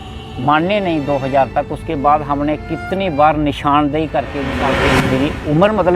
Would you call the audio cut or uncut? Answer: cut